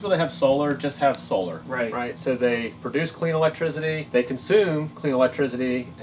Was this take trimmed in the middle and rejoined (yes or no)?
yes